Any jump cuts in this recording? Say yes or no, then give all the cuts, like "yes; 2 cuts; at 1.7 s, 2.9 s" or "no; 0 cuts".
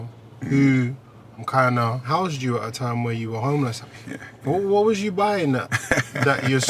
yes; 2 cuts; at 2.1 s, 3.8 s